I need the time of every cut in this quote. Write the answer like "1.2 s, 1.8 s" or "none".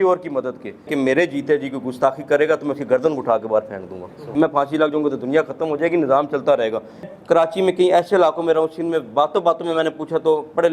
0.9 s, 4.2 s, 7.1 s